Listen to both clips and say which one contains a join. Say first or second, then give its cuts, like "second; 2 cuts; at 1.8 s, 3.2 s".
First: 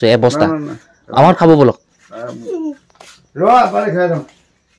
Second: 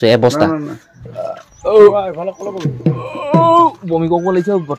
second; 1 cut; at 1.0 s